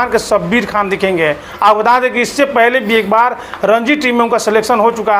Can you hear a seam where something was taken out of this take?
no; 0 cuts

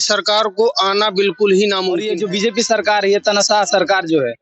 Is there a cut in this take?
yes; 1 cut; at 2.1 s

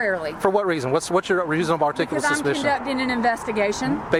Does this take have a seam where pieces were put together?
no; 0 cuts

